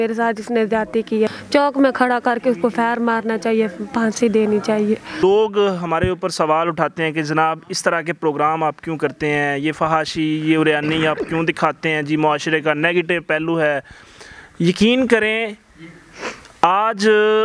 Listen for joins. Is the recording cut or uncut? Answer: cut